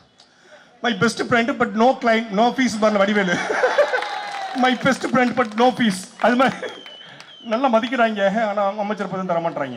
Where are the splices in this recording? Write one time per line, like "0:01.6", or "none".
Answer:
none